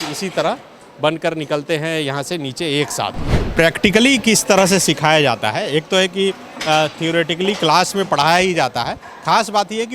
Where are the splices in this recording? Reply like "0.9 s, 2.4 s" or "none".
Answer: 3.4 s